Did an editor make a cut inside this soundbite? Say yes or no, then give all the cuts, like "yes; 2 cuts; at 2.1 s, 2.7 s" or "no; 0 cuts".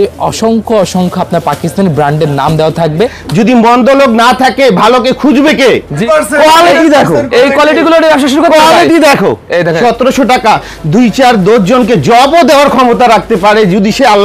yes; 3 cuts; at 3.2 s, 6.0 s, 9.8 s